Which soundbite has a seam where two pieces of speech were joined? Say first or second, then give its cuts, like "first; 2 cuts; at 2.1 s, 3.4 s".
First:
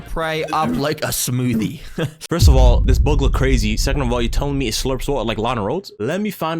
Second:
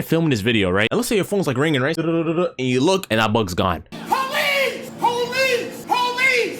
second; 2 cuts; at 0.9 s, 2.0 s